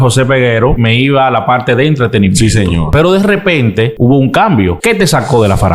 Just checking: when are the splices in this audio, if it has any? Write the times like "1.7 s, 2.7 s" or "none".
0.8 s, 2.9 s, 3.9 s, 4.8 s

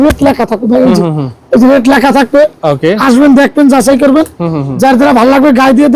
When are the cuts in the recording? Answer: none

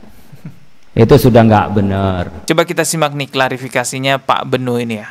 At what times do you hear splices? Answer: 2.3 s

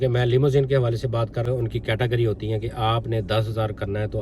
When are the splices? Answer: 1.4 s

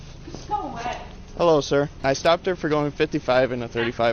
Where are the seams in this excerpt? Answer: none

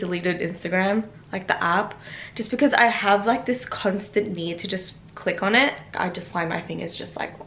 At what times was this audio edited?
none

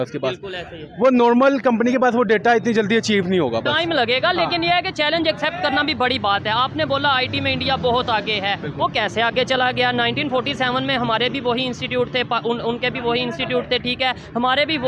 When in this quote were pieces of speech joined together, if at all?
none

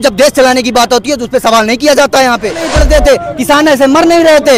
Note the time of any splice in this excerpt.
2.7 s

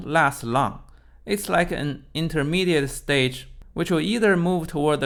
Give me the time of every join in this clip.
none

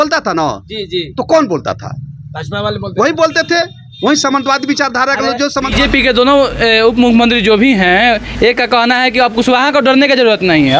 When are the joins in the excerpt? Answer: 5.7 s

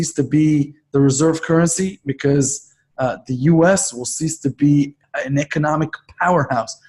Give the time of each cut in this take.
5.0 s

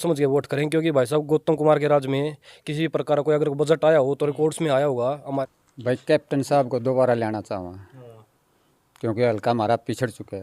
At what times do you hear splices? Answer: 5.4 s

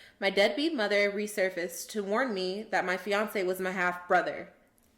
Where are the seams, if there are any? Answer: none

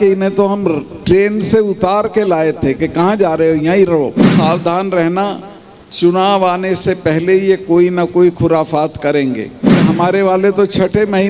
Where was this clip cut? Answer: 4.3 s, 9.8 s

